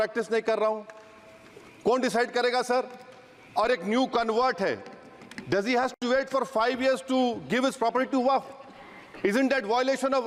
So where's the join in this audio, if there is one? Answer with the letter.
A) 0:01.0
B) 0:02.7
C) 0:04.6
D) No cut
D